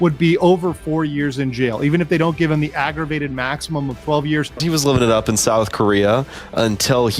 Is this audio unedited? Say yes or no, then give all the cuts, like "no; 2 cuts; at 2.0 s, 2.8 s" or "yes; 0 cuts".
no; 1 cut; at 4.6 s